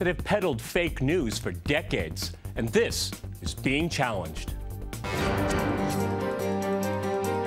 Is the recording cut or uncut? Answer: uncut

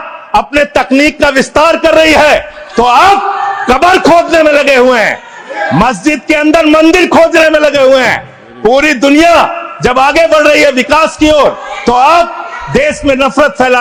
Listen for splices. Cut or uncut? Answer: uncut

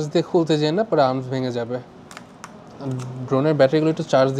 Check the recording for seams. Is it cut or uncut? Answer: uncut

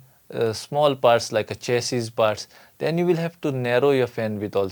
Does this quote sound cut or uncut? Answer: uncut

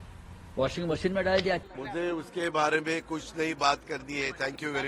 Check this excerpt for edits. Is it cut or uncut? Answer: cut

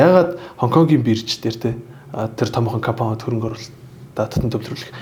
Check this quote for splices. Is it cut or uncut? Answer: uncut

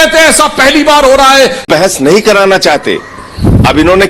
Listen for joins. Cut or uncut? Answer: cut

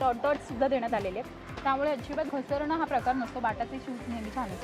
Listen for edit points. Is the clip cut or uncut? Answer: cut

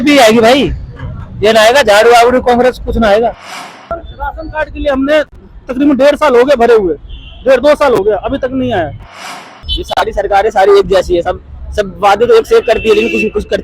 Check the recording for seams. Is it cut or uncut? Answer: cut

